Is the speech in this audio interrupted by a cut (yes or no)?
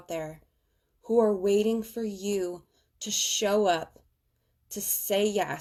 no